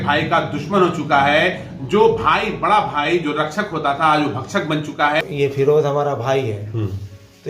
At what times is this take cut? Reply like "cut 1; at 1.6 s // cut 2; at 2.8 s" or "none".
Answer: cut 1; at 5.2 s